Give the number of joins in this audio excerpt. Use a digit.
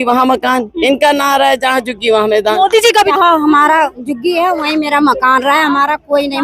1